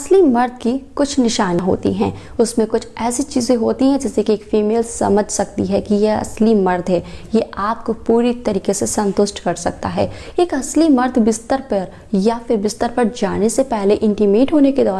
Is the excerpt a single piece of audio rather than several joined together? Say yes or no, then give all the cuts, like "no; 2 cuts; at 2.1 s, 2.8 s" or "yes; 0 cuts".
no; 1 cut; at 1.6 s